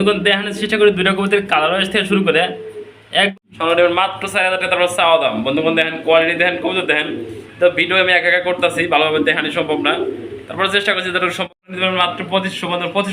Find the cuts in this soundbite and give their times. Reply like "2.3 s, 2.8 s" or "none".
3.3 s, 11.4 s